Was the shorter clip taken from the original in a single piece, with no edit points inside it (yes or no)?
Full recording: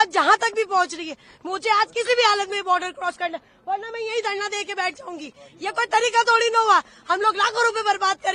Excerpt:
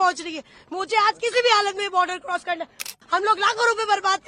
no